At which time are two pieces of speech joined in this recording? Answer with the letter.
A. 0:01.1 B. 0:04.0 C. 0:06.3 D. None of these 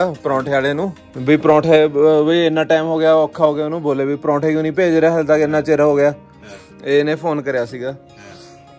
A